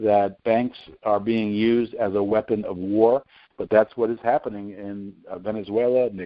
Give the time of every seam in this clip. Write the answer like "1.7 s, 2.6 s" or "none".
none